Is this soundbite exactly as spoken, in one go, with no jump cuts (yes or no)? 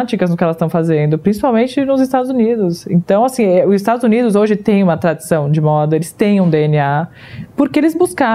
yes